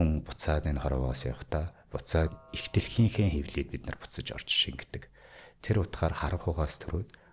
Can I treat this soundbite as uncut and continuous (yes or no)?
yes